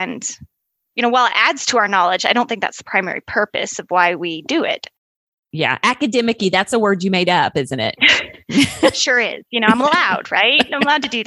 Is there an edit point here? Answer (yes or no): no